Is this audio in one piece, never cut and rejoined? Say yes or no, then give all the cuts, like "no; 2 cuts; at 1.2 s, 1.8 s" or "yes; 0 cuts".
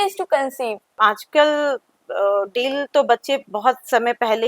no; 2 cuts; at 0.9 s, 3.5 s